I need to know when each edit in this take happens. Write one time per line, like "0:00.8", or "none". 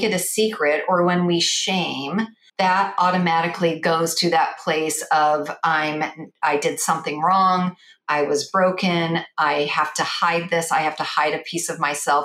0:02.4